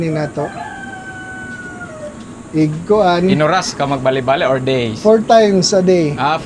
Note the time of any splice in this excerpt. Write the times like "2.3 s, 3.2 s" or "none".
none